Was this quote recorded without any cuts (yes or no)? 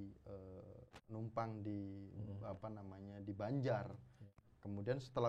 yes